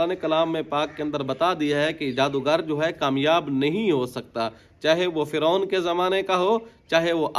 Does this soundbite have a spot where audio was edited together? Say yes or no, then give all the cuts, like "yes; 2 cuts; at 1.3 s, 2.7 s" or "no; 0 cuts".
no; 0 cuts